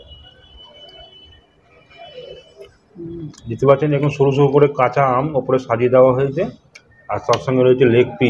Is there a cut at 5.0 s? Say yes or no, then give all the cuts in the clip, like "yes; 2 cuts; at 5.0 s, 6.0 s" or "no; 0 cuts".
no; 0 cuts